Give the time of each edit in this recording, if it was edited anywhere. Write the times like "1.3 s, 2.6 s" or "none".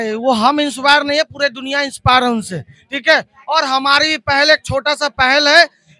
none